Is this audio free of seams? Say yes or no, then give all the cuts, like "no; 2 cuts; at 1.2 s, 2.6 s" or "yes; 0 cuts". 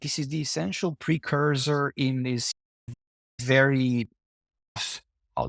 yes; 0 cuts